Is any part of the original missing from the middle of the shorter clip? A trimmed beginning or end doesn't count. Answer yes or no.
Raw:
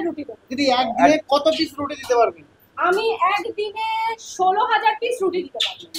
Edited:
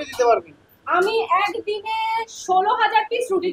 no